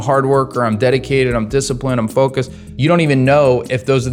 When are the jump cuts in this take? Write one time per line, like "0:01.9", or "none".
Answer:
none